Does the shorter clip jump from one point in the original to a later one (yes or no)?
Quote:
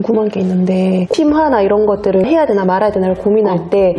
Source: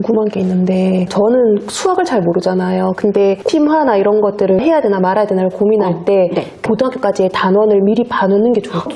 yes